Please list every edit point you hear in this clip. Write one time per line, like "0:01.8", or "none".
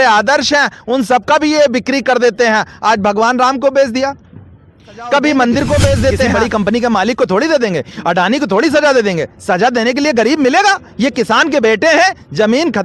0:06.3